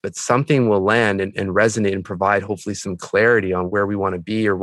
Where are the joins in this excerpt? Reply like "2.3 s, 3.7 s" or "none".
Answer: 3.7 s